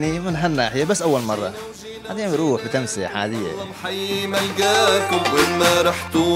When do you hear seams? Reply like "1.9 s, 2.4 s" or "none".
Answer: 3.8 s